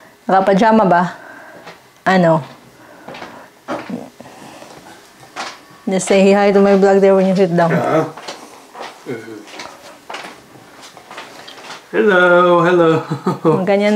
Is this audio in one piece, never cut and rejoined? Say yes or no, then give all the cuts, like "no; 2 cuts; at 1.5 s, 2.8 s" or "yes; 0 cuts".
yes; 0 cuts